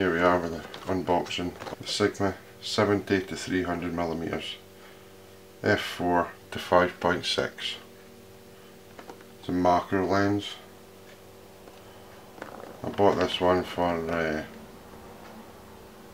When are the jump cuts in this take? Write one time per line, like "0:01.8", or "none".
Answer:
0:01.6